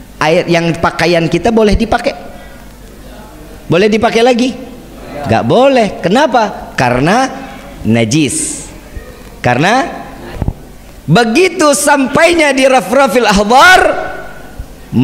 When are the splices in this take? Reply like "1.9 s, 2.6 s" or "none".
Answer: 10.3 s